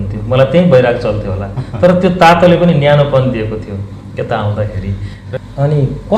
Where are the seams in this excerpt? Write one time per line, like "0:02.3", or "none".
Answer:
0:05.1